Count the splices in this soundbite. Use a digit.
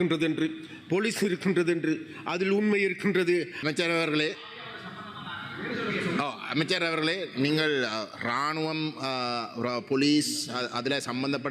1